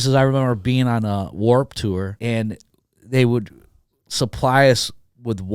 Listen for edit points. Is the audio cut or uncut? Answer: cut